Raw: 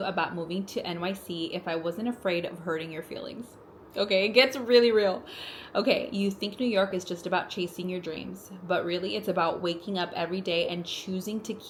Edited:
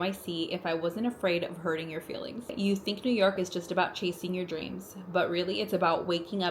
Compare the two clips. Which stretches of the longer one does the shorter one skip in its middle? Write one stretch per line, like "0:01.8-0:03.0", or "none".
0:03.5-0:06.1